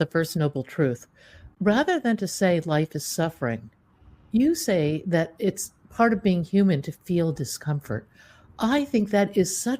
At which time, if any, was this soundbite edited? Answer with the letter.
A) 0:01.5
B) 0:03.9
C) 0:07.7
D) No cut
A